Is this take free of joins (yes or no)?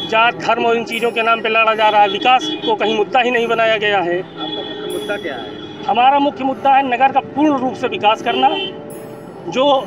yes